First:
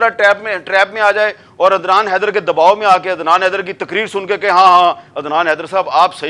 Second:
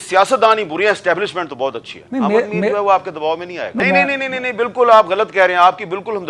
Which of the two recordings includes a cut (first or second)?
second